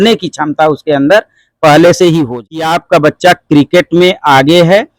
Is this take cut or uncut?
cut